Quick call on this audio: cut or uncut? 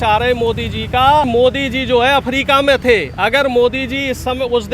cut